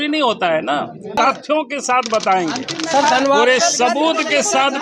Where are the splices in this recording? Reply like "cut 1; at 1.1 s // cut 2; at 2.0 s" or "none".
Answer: cut 1; at 1.2 s